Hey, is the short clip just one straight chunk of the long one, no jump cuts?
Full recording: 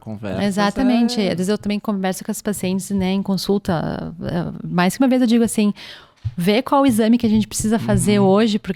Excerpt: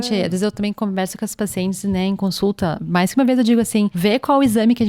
no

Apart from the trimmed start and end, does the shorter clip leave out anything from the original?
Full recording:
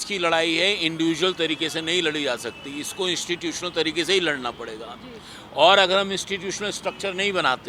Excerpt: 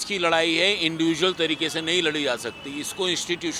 no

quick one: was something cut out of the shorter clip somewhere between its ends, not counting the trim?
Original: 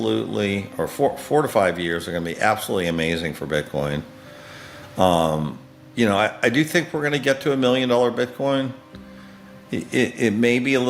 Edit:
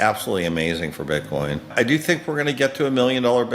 yes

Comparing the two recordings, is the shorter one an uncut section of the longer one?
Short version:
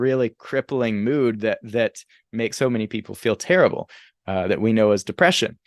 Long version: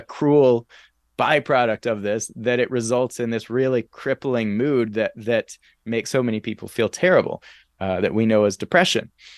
yes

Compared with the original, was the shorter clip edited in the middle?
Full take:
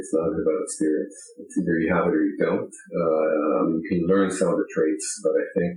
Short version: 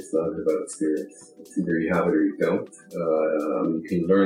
no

